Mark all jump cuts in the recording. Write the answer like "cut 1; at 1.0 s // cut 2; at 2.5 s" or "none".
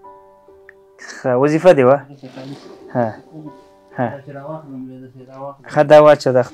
cut 1; at 2.2 s

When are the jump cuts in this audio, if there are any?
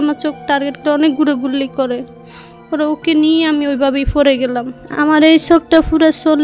cut 1; at 4.8 s

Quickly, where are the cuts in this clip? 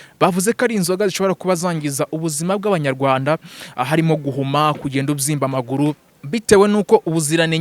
cut 1; at 6.1 s

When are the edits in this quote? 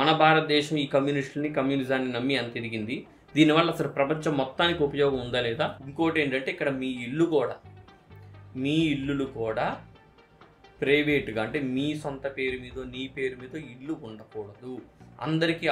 cut 1; at 5.8 s

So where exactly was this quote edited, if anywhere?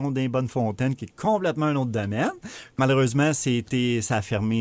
cut 1; at 2.8 s

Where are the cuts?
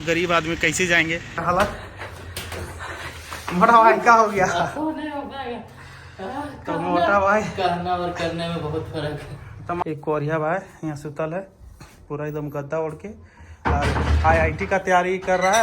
cut 1; at 1.4 s // cut 2; at 9.8 s

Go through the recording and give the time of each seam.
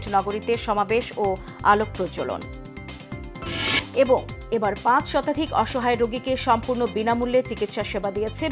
none

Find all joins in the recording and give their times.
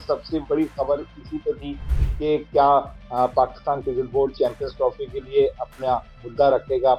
none

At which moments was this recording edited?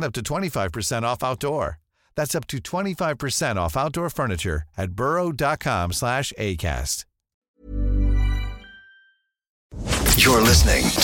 cut 1; at 9.8 s

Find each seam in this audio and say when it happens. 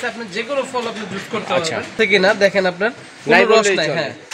cut 1; at 1.9 s

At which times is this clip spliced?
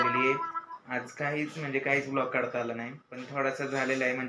cut 1; at 3.3 s

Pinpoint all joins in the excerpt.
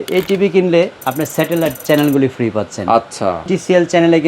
cut 1; at 1.0 s // cut 2; at 3.4 s

